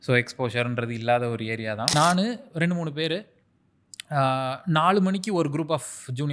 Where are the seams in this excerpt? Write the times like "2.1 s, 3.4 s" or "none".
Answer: 1.9 s